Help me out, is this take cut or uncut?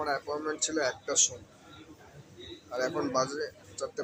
uncut